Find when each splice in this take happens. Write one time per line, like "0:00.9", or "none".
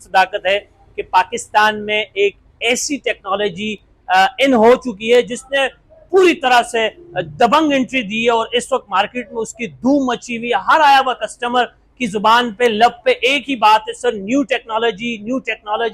none